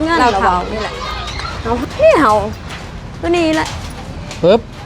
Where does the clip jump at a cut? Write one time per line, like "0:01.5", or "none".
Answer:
0:01.8